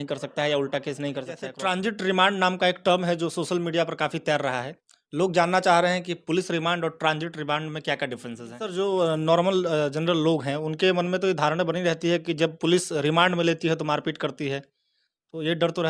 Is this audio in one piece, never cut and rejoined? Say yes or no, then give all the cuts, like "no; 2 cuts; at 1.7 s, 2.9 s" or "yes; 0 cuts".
no; 2 cuts; at 1.5 s, 8.6 s